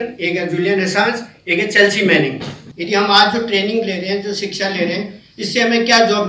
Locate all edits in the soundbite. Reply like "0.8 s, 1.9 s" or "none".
2.6 s